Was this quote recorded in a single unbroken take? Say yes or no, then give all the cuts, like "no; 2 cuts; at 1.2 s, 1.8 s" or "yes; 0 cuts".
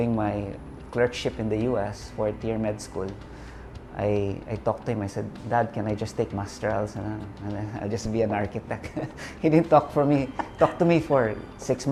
yes; 0 cuts